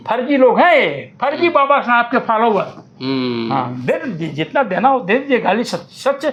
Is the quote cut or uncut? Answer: uncut